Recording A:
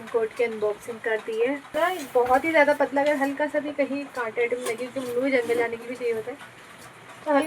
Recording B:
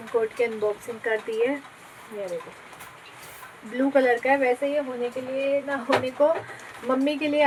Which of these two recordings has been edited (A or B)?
A